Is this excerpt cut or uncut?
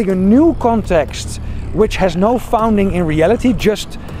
uncut